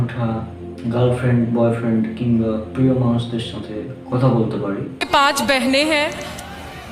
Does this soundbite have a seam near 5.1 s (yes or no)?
yes